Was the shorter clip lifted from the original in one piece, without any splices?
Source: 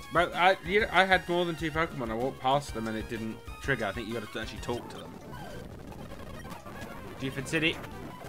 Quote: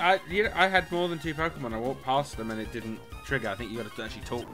yes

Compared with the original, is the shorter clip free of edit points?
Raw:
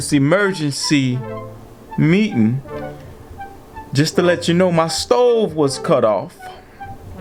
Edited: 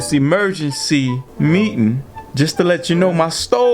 no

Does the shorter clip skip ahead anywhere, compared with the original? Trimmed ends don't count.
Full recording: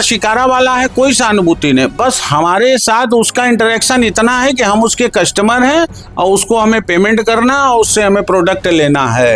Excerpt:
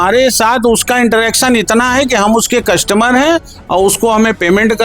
no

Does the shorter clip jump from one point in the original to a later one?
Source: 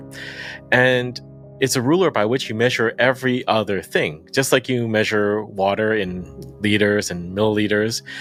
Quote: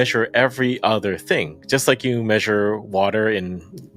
no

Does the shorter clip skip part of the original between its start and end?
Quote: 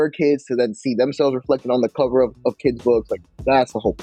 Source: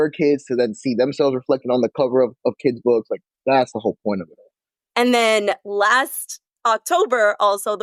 no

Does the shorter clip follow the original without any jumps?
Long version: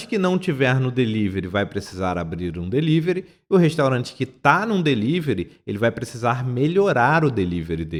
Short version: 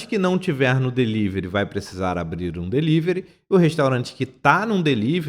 yes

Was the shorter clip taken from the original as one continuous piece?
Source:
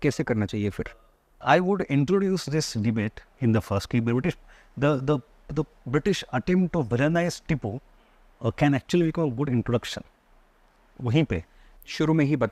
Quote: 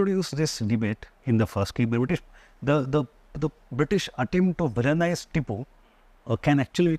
yes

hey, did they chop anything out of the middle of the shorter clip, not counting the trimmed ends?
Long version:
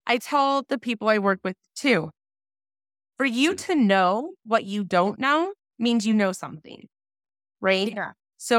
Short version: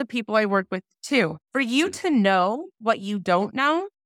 yes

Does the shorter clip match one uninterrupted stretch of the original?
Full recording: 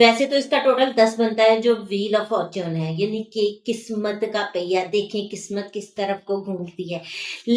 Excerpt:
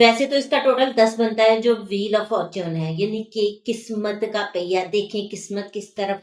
yes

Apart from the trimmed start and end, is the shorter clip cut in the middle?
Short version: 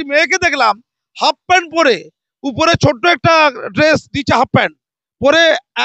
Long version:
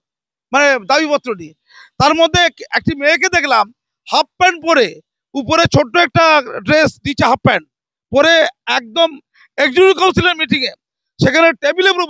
no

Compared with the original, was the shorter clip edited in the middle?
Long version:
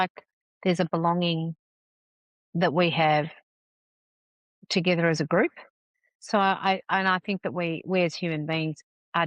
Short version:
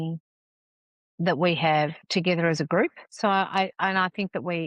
yes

